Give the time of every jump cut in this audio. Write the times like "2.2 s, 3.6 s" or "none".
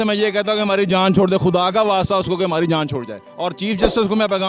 3.2 s